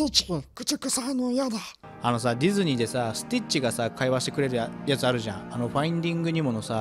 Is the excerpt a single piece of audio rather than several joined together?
yes; 0 cuts

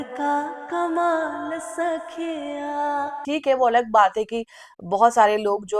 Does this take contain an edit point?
yes; 1 cut; at 3.2 s

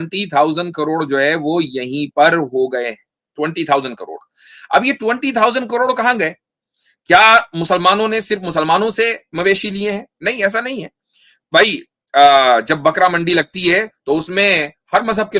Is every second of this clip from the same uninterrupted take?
yes; 0 cuts

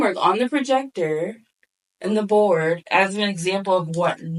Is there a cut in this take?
no; 0 cuts

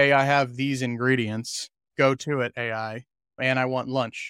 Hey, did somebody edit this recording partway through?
yes; 1 cut; at 3.4 s

